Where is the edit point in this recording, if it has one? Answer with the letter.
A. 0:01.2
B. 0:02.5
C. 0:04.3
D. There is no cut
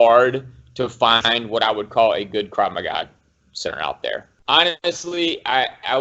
C